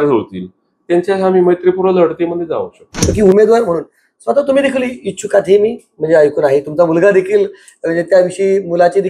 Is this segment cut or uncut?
cut